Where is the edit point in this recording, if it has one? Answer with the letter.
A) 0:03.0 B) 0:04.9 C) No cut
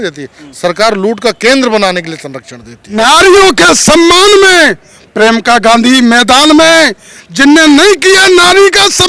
A